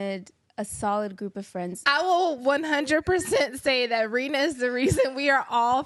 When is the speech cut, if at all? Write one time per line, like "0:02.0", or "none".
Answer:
0:01.8